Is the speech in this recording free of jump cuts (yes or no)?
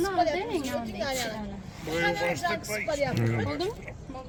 yes